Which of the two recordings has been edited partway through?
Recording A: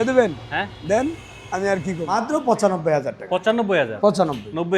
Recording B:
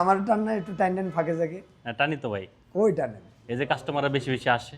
A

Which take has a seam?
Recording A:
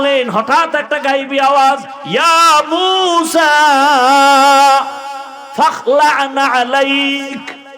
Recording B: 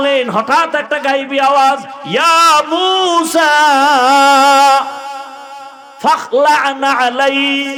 A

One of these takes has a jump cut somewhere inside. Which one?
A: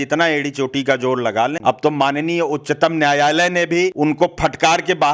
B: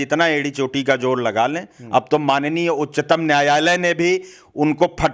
A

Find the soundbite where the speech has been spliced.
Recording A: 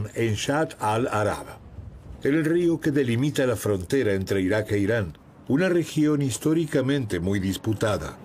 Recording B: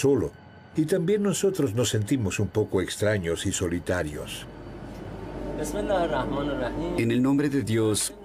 A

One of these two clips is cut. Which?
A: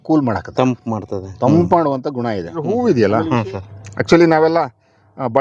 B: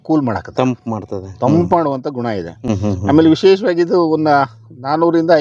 A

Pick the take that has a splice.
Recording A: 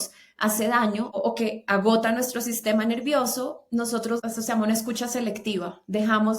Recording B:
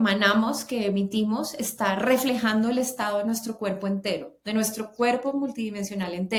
A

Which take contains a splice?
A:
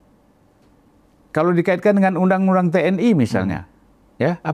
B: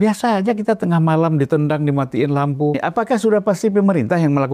B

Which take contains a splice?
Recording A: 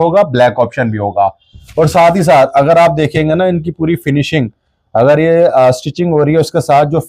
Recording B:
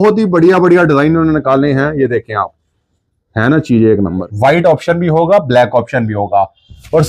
B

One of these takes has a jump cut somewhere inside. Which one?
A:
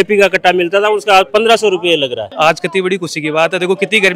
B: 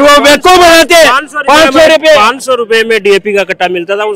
A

